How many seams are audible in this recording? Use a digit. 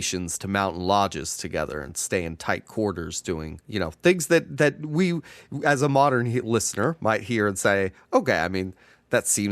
1